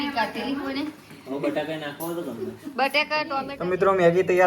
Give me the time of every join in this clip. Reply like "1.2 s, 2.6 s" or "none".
3.3 s